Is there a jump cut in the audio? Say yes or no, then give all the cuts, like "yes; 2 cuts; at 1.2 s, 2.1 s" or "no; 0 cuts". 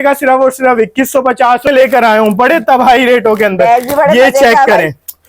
yes; 1 cut; at 1.6 s